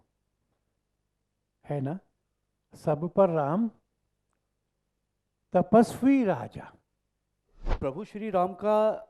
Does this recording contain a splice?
yes; 1 cut; at 7.6 s

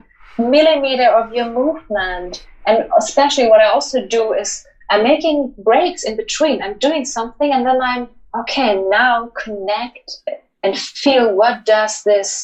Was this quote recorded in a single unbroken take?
yes; 0 cuts

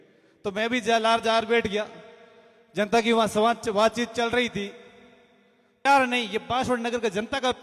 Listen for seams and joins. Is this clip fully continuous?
no; 1 cut; at 5.8 s

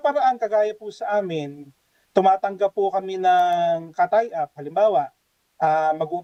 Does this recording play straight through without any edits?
yes; 0 cuts

